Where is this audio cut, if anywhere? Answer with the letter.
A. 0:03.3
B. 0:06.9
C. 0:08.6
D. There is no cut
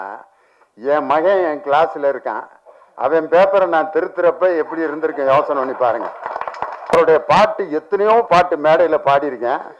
B